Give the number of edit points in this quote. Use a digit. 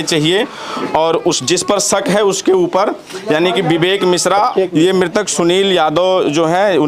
1